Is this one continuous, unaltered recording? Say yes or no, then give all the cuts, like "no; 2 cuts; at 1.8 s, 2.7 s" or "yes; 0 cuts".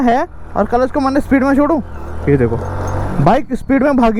yes; 0 cuts